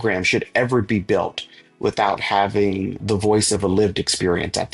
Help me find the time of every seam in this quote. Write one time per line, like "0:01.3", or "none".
0:03.0